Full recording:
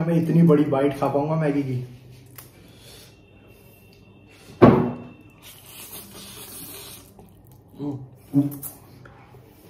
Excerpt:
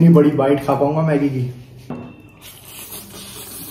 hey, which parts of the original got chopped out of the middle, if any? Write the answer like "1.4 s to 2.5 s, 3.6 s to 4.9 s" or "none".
2.2 s to 4.9 s